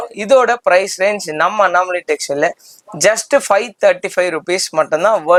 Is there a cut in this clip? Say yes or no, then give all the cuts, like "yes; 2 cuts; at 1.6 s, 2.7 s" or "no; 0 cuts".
no; 0 cuts